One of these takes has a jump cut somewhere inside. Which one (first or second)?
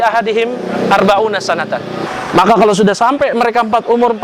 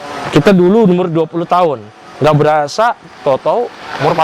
first